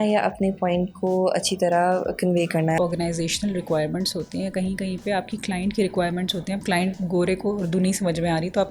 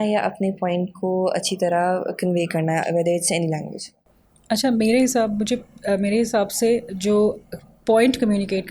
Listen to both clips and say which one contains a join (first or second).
first